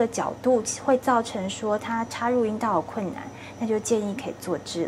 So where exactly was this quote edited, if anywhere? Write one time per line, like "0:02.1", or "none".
none